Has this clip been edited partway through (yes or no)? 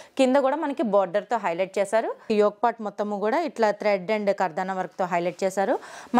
yes